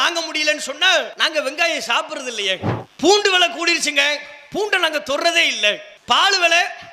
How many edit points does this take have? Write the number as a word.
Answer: one